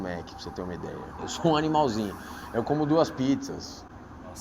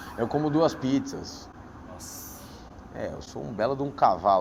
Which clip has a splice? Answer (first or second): first